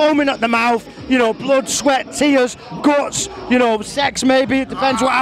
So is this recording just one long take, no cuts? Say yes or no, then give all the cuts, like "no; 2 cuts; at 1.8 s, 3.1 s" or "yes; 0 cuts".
yes; 0 cuts